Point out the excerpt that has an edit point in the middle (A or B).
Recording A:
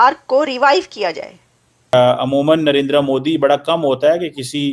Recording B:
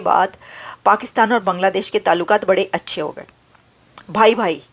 A